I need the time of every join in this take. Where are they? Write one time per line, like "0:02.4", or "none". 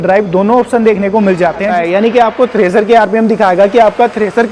0:01.7

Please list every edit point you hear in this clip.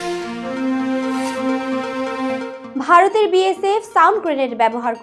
none

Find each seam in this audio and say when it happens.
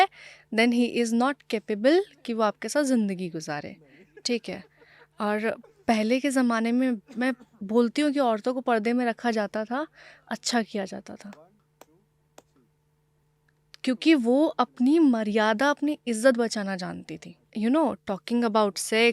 0:17.4

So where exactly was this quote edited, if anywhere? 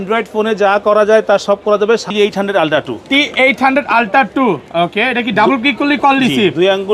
0:02.1

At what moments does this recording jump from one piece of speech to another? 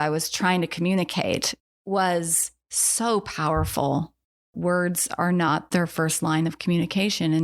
0:01.5
0:04.5
0:05.6

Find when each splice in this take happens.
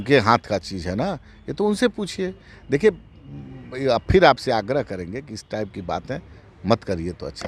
none

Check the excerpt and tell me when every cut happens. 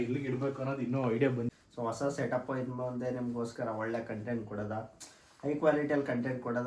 0:01.5

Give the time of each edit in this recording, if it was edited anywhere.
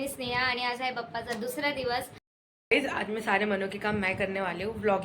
0:02.3

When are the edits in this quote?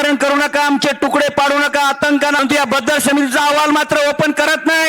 0:02.4

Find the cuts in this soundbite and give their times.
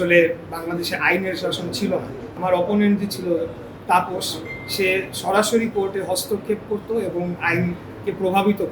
0:02.4

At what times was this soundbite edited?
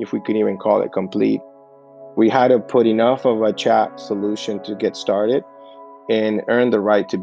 0:01.6

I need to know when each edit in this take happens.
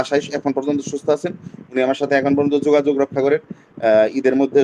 none

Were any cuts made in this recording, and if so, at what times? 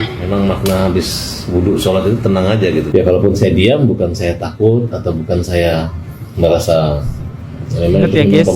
0:02.9

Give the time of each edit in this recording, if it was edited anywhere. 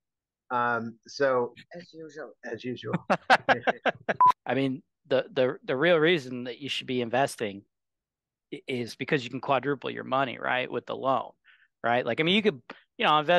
0:04.3

